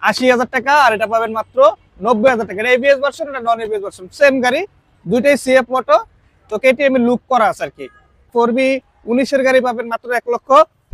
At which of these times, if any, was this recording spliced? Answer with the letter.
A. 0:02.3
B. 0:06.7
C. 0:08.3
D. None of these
C